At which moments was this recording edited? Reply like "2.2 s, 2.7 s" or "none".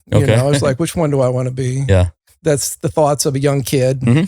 2.4 s